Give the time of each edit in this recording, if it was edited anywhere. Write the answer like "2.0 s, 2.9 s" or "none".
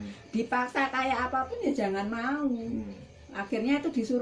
none